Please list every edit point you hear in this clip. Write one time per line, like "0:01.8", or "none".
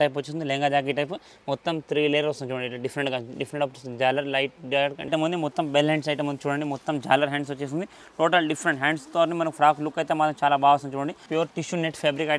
0:05.1
0:11.2